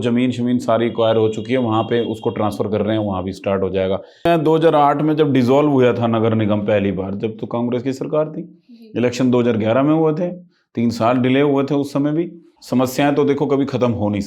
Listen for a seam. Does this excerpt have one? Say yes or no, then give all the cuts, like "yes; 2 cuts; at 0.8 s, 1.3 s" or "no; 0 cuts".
yes; 2 cuts; at 4.2 s, 12.5 s